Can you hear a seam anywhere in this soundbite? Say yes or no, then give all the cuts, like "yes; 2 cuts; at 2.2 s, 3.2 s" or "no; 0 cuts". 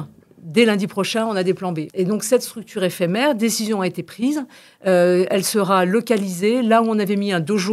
yes; 1 cut; at 1.8 s